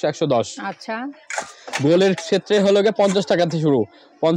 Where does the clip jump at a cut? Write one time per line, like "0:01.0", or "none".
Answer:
none